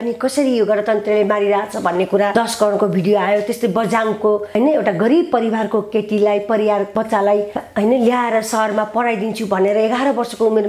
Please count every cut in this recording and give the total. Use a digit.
3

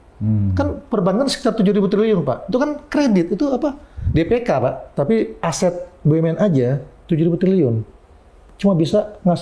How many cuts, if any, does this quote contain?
1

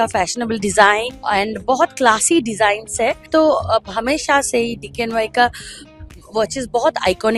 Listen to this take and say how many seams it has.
2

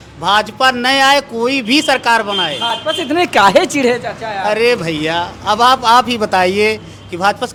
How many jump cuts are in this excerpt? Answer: 0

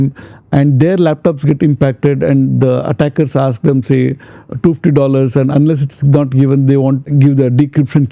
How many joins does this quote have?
1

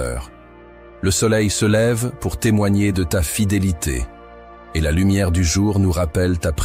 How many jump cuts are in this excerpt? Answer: 0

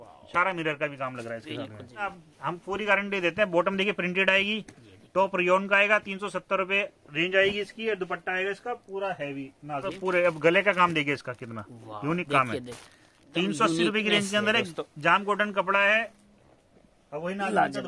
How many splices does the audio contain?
2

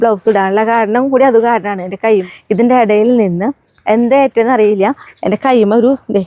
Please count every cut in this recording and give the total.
1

